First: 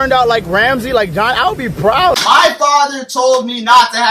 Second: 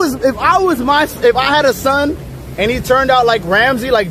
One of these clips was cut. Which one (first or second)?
first